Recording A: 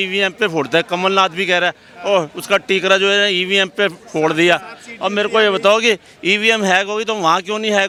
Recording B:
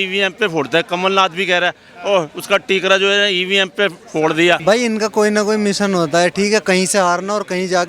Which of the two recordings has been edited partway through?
B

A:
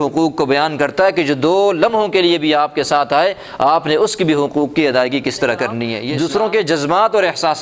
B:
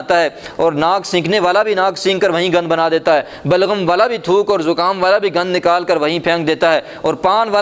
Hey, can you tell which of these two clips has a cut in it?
A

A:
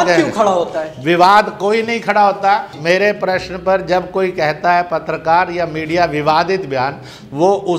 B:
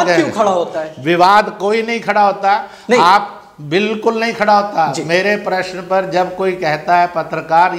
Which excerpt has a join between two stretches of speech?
A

